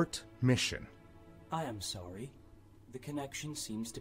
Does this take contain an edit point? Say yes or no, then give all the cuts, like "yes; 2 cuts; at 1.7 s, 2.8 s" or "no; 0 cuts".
yes; 1 cut; at 1.1 s